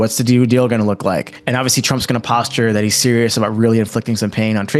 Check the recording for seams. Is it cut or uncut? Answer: cut